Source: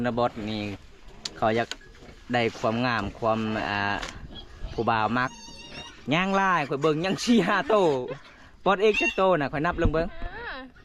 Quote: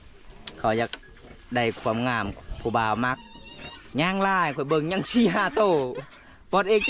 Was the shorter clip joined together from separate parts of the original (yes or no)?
yes